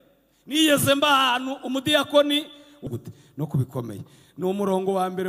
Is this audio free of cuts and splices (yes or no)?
no